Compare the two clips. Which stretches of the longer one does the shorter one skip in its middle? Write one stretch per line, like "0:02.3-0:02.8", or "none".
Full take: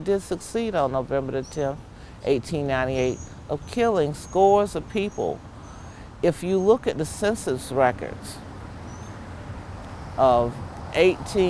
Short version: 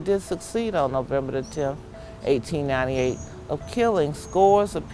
none